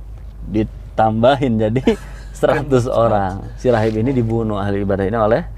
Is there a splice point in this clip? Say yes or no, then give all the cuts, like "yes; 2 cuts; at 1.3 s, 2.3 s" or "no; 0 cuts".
no; 0 cuts